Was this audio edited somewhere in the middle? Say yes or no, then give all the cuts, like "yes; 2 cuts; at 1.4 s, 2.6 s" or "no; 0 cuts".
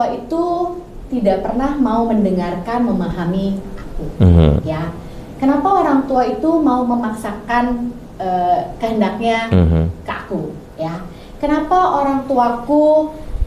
no; 0 cuts